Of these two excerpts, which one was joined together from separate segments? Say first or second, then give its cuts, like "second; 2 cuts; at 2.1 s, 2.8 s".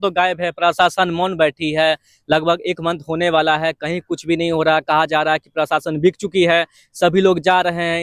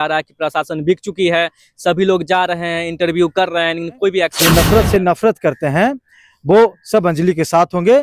second; 1 cut; at 4.4 s